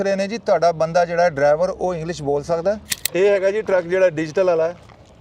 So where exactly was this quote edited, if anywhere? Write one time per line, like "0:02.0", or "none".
0:02.9